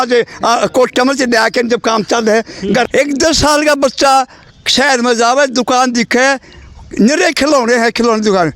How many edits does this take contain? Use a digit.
1